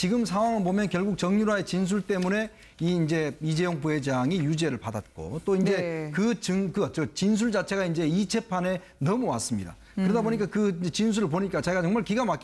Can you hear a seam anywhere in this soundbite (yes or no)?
no